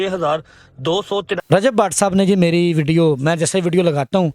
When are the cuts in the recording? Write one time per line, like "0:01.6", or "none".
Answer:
0:01.3